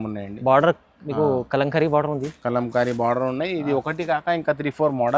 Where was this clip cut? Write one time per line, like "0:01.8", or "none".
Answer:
none

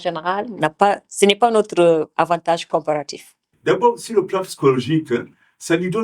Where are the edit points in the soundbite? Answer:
0:03.4

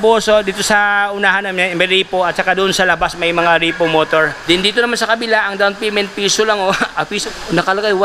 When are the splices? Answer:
0:04.4
0:07.2

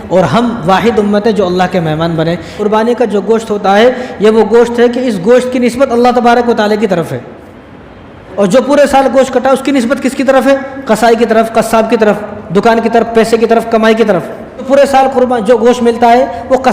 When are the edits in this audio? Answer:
0:02.6
0:08.3
0:14.7

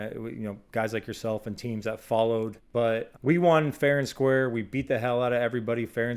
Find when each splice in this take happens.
0:02.6

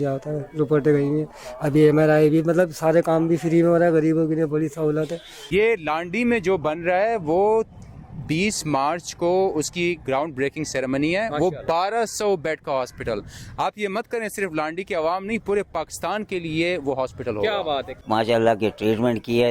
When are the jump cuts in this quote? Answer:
0:05.4
0:18.0

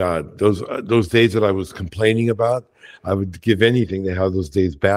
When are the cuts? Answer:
none

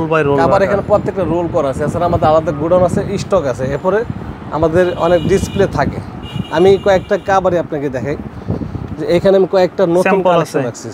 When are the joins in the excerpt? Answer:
none

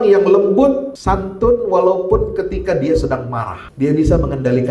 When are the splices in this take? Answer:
0:00.9
0:03.6

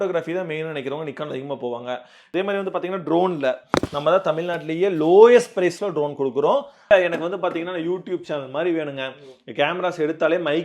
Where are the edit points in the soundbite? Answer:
0:02.2
0:06.9

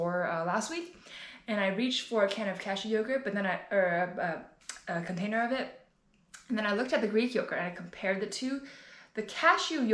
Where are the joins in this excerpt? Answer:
none

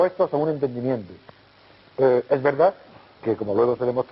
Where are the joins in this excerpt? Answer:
0:03.2

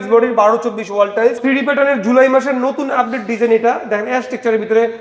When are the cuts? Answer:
0:01.4

